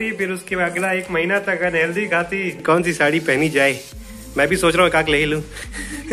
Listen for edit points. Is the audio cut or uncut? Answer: cut